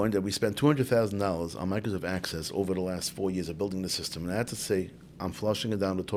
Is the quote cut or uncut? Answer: uncut